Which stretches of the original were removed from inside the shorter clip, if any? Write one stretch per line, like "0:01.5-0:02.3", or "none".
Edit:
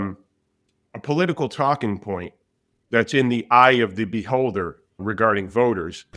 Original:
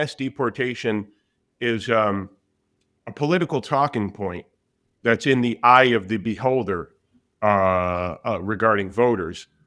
0:07.2-0:08.5